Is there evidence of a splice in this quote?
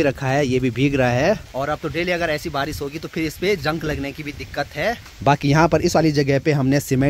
no; 0 cuts

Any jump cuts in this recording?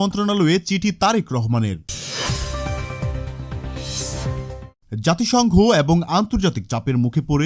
yes; 2 cuts; at 2.0 s, 4.7 s

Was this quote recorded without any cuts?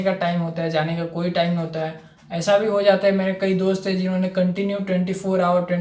yes; 0 cuts

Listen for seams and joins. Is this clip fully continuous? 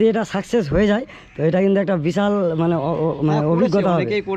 yes; 0 cuts

